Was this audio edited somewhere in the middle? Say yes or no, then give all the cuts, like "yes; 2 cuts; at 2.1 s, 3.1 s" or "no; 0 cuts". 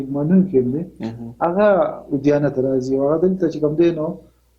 no; 0 cuts